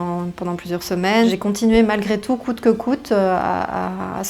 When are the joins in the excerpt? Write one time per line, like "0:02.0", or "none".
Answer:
0:01.3